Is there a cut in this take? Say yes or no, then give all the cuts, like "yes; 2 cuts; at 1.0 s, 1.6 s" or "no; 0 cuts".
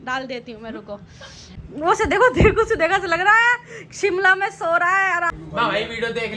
yes; 2 cuts; at 1.6 s, 5.3 s